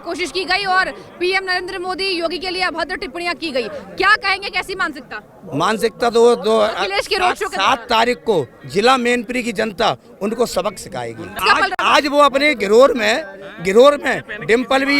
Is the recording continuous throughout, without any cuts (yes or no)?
no